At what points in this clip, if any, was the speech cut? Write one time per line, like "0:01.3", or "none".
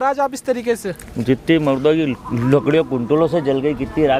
none